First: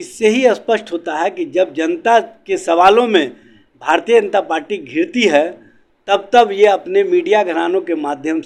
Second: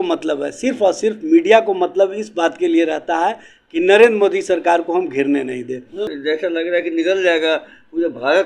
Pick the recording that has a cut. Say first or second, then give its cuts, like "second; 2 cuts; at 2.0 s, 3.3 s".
second; 1 cut; at 6.1 s